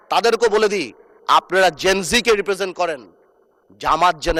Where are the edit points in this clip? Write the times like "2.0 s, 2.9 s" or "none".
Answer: none